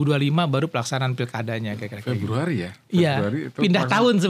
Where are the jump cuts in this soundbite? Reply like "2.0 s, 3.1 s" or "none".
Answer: 1.9 s